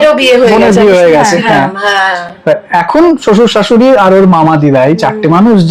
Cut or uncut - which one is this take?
uncut